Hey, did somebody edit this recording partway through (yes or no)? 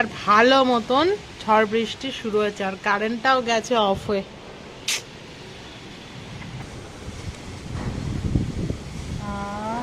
yes